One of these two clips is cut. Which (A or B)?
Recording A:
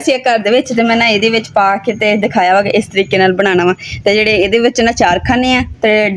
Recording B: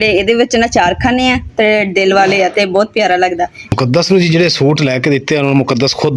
B